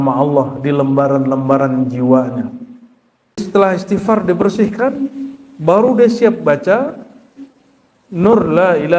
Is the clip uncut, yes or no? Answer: no